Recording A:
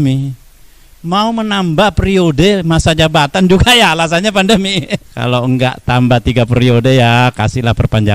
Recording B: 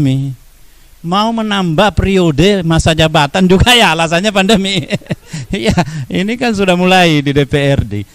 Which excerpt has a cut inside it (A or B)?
A